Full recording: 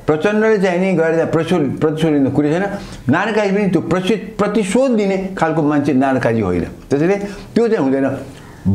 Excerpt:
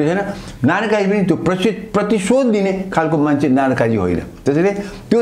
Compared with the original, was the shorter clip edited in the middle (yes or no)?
no